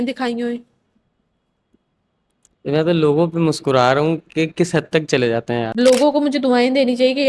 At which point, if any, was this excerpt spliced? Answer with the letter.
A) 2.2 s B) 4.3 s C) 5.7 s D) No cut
C